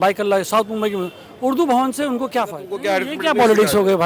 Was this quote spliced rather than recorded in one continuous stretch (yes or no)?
yes